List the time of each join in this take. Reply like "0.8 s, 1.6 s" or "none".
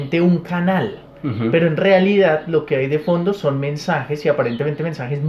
none